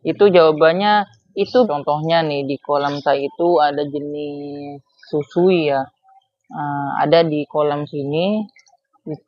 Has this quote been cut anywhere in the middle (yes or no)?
yes